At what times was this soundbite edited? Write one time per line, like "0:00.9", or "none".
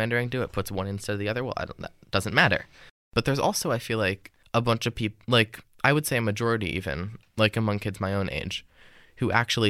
0:03.0
0:04.3